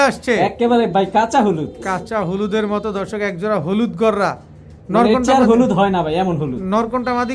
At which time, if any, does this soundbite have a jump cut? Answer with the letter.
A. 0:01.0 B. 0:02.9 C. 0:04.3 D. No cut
D